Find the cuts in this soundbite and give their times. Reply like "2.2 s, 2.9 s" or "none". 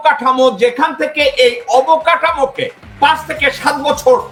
none